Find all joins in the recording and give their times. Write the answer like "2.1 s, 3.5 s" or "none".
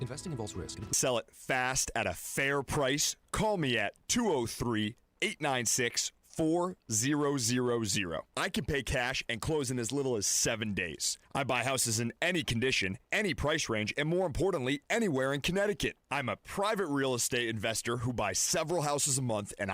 0.9 s